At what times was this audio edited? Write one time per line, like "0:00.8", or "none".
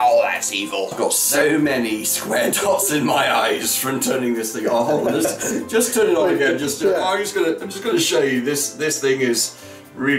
0:00.9